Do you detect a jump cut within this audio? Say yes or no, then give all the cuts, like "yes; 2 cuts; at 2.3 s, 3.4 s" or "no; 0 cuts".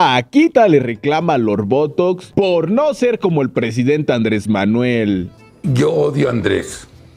yes; 1 cut; at 0.9 s